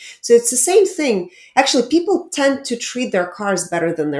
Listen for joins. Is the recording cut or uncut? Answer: uncut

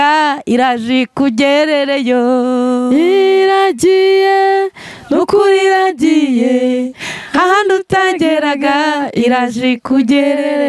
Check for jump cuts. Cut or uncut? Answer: uncut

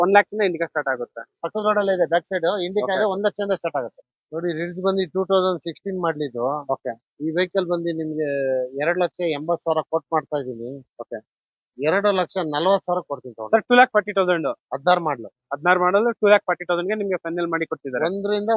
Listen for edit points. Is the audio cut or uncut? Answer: cut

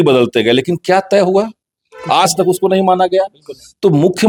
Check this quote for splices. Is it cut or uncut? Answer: uncut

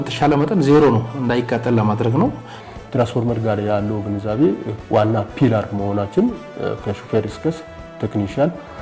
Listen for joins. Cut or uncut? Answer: cut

